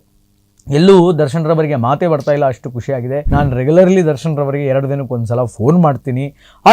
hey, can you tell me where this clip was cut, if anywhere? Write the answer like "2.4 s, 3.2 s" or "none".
3.3 s

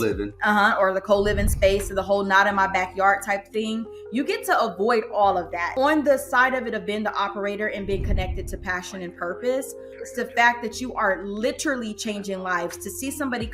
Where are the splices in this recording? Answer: 5.7 s, 10.0 s

